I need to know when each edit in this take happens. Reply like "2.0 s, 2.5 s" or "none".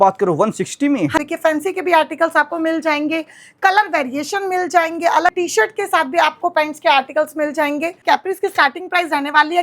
1.2 s, 5.3 s, 8.0 s